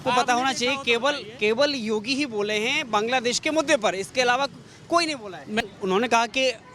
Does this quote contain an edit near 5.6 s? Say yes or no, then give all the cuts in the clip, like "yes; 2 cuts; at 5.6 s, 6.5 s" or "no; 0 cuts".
yes; 1 cut; at 5.6 s